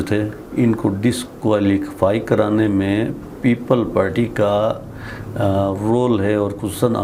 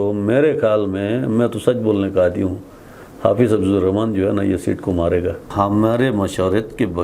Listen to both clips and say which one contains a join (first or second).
second